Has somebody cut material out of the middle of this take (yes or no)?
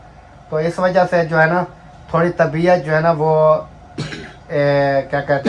no